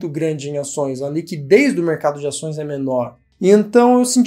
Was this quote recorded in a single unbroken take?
yes; 0 cuts

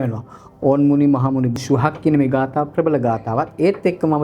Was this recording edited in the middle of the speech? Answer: yes; 1 cut; at 1.6 s

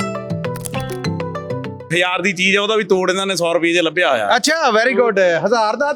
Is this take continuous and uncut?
no; 1 cut; at 1.8 s

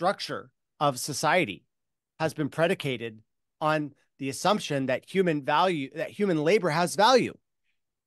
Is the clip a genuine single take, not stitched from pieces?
yes; 0 cuts

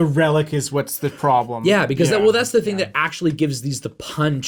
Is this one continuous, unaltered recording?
yes; 0 cuts

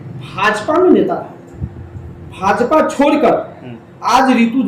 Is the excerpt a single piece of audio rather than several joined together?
yes; 0 cuts

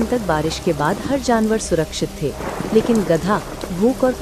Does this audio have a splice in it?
no; 0 cuts

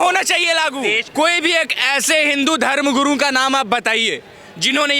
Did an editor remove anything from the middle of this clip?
yes; 1 cut; at 1.0 s

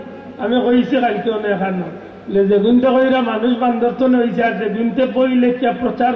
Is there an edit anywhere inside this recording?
no; 0 cuts

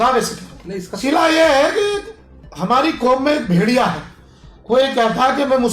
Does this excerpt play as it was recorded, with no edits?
no; 1 cut; at 0.9 s

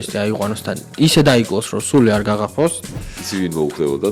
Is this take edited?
yes; 1 cut; at 2.8 s

